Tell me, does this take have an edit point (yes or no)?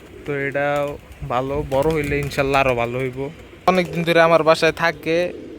yes